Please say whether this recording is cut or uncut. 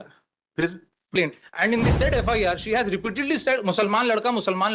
cut